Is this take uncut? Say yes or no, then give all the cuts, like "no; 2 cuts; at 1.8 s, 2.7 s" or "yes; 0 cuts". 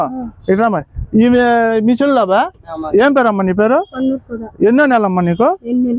no; 1 cut; at 2.4 s